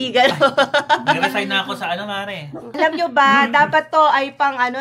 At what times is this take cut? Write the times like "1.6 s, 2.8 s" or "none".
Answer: 2.8 s